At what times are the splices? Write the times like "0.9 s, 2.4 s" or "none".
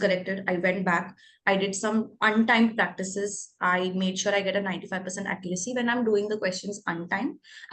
none